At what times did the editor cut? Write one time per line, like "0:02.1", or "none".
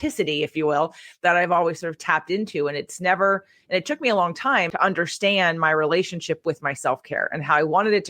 0:04.7